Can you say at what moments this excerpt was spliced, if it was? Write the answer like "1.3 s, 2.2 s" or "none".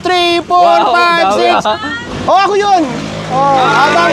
2.0 s

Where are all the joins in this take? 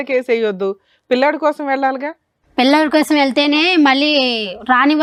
none

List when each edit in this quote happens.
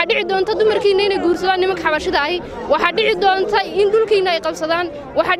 none

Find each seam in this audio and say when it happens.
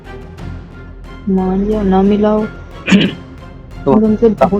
1.1 s

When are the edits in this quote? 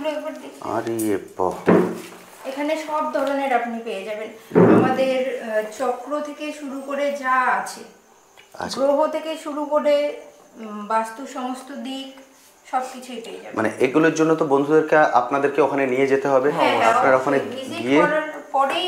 none

